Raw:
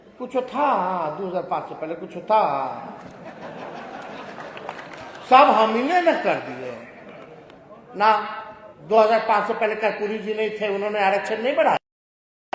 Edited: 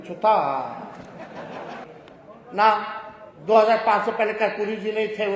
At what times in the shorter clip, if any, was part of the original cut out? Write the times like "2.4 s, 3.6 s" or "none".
1.8 s

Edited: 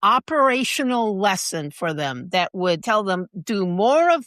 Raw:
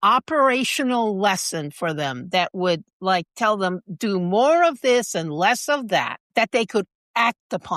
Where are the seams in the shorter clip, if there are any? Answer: 2.8 s

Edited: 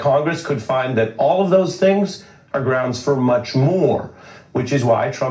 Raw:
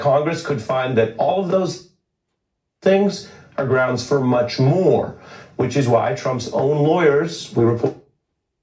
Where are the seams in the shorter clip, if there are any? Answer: 1.7 s

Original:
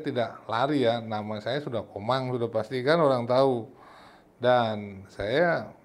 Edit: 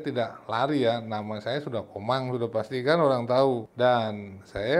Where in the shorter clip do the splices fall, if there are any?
3.7 s

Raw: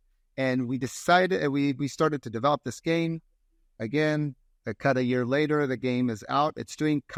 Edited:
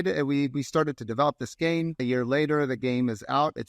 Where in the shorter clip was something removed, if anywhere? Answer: 2.0 s

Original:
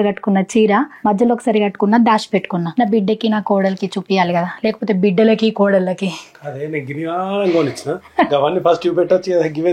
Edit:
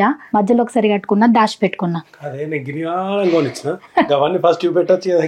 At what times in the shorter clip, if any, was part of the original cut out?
2.0 s

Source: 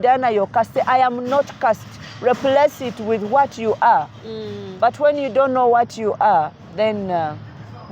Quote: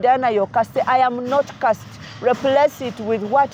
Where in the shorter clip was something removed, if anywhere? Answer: none

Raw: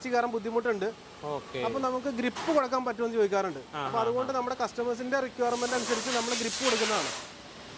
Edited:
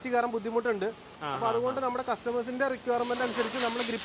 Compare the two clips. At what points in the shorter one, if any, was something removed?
1.1 s

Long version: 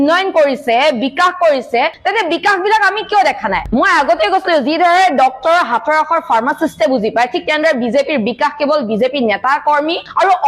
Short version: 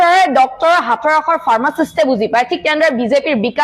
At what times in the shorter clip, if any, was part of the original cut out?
none

